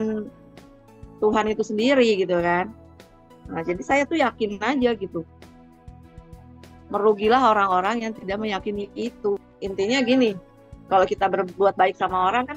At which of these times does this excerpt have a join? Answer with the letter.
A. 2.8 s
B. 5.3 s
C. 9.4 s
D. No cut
C